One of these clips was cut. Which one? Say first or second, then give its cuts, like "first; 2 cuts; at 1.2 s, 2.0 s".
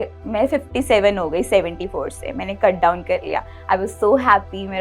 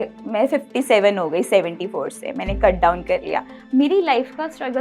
second; 1 cut; at 3.5 s